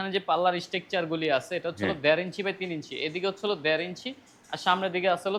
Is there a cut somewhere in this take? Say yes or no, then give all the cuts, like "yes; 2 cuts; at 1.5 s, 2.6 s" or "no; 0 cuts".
no; 0 cuts